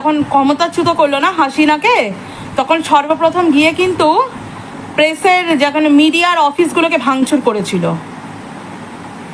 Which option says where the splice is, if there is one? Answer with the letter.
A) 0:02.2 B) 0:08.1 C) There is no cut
C